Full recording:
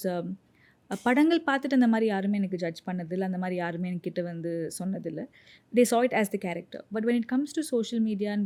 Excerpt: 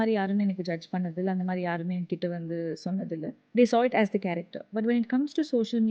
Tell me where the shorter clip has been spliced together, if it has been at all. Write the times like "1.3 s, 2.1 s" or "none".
3.4 s